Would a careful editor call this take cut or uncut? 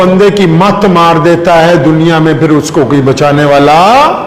uncut